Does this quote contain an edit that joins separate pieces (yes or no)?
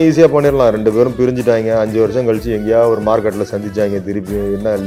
no